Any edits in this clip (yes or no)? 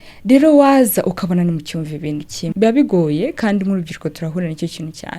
yes